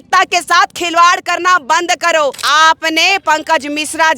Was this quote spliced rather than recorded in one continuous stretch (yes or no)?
yes